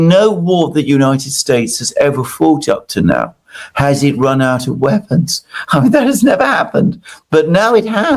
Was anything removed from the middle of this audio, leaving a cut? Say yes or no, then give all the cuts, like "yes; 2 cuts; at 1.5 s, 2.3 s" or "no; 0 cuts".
no; 0 cuts